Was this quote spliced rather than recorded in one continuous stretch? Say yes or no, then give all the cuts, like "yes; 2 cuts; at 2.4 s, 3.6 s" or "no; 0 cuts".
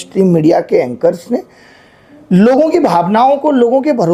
no; 0 cuts